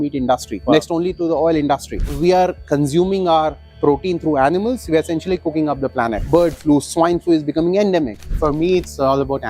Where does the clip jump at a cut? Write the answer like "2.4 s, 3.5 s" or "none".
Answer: 2.0 s, 6.2 s, 8.3 s